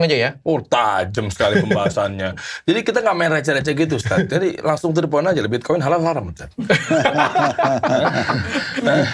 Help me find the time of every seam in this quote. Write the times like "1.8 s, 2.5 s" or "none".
none